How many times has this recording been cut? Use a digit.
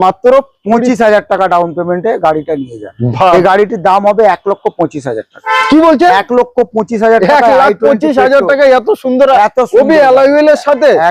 1